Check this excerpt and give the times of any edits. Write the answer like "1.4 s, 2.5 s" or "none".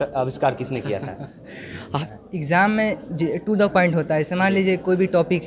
2.0 s